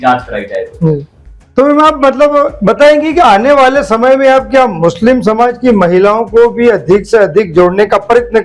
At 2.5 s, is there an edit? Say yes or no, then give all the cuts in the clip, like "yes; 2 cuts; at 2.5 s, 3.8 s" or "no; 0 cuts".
no; 1 cut; at 1.1 s